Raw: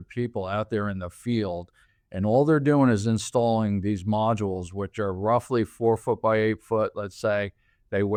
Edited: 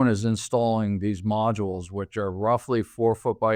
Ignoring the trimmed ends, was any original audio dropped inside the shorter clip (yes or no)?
no